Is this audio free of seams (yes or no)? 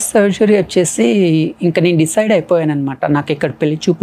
yes